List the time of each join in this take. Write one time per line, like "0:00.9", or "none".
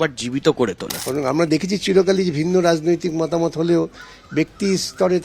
0:00.9

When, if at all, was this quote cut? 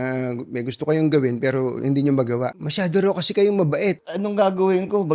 0:02.6
0:04.1

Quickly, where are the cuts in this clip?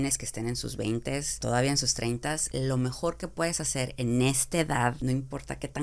0:01.4
0:02.4
0:05.0

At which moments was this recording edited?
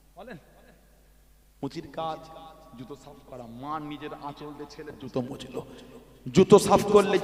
none

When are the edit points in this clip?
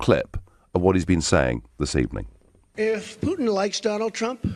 none

